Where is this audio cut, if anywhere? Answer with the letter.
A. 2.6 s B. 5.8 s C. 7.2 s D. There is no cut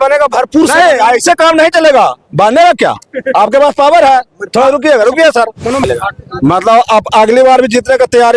B